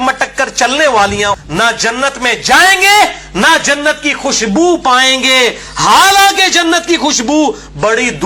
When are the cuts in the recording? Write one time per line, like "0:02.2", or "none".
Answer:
0:01.4